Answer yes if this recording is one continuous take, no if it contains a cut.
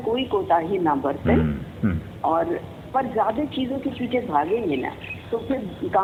yes